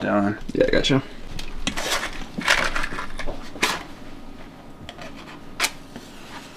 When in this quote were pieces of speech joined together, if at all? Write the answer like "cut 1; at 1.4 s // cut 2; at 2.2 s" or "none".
cut 1; at 1.4 s